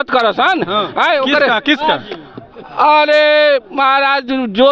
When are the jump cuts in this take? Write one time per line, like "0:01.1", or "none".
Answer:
none